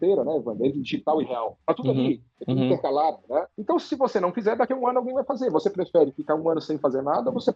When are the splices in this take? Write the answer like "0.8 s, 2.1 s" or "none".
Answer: none